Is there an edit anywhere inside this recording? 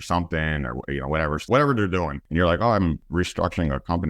yes; 3 cuts; at 1.5 s, 2.2 s, 3.0 s

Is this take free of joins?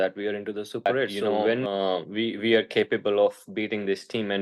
no; 1 cut; at 1.6 s

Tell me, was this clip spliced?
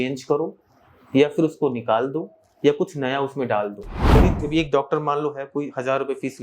yes; 1 cut; at 4.2 s

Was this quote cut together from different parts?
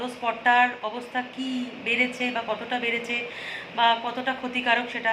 no; 0 cuts

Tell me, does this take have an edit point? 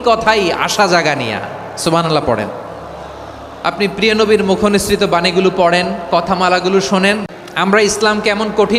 yes; 1 cut; at 7.2 s

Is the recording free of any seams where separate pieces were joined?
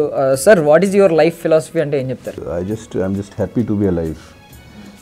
no; 1 cut; at 2.5 s

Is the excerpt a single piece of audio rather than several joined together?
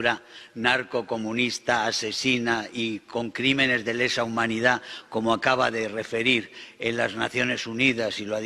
yes; 0 cuts

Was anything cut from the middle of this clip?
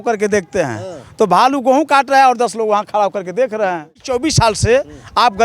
yes; 1 cut; at 4.0 s

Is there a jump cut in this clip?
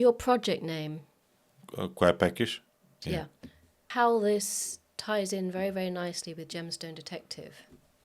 yes; 1 cut; at 3.9 s

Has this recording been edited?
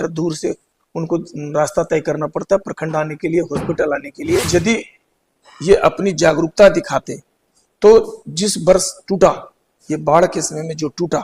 yes; 1 cut; at 4.5 s

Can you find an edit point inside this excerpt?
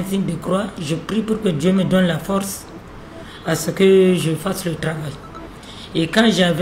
no; 0 cuts

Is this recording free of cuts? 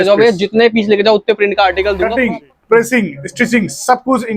no; 1 cut; at 1.9 s

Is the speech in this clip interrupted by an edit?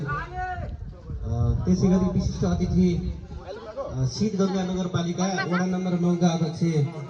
no; 0 cuts

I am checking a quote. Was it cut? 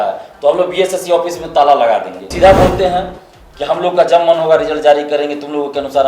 yes; 1 cut; at 2.2 s

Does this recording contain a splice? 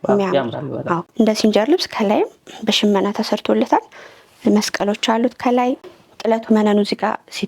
yes; 2 cuts; at 1.1 s, 5.8 s

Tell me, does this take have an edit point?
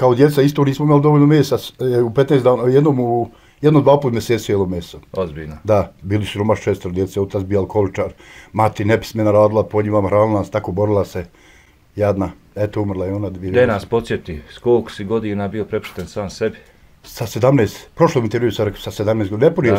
no; 0 cuts

